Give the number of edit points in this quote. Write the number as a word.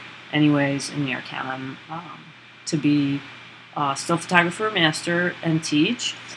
one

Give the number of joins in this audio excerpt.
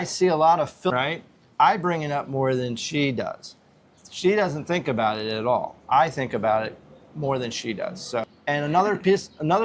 two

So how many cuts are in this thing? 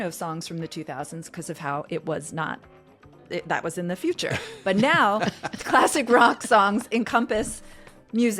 zero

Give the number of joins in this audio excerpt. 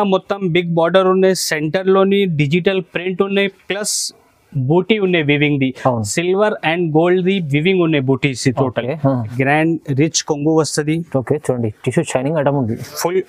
one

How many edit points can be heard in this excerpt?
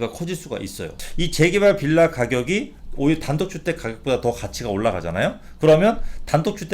one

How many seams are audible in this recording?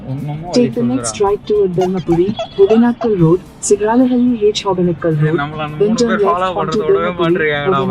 zero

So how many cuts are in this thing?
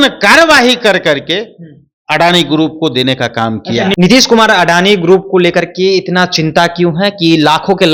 zero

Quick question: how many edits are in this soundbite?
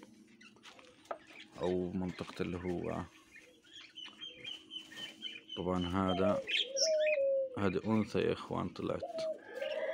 zero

